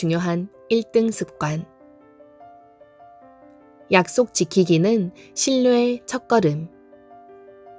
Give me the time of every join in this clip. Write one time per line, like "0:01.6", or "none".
0:06.7